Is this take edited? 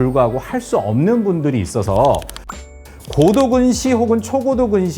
no; 0 cuts

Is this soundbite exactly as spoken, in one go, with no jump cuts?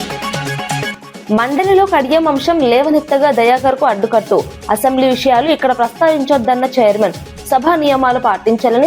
no; 1 cut; at 0.9 s

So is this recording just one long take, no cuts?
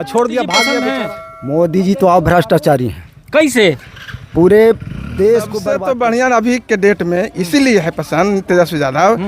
no; 2 cuts; at 0.9 s, 5.7 s

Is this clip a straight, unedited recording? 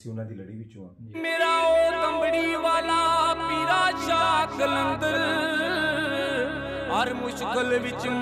no; 1 cut; at 1.2 s

